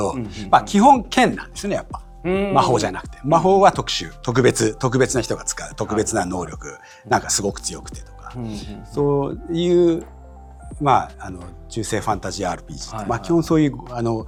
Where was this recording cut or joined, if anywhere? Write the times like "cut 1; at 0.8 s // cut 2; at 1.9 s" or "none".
none